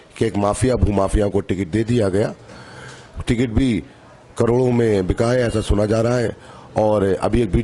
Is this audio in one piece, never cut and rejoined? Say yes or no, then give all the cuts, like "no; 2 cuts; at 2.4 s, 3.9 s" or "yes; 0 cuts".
yes; 0 cuts